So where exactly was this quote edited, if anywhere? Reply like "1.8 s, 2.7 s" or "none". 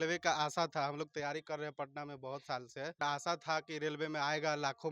3.0 s